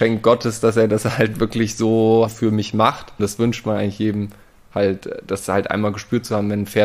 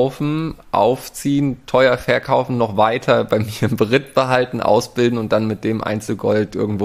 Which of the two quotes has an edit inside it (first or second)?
first